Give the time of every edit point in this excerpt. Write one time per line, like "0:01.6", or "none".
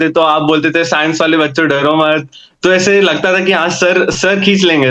none